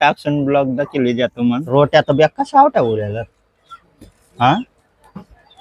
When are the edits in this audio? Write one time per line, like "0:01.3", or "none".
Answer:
0:01.7